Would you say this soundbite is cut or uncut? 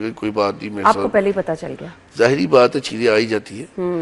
uncut